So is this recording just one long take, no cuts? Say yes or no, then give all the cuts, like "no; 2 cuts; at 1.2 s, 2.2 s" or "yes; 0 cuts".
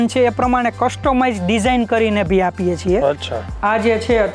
no; 1 cut; at 3.4 s